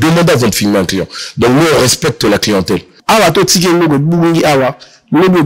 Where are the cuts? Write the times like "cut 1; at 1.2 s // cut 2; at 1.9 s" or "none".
cut 1; at 2.9 s